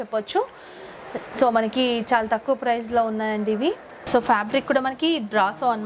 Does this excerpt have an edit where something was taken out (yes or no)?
yes